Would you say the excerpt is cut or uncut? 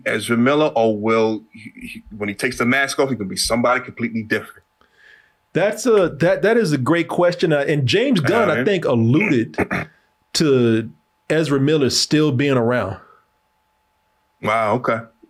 uncut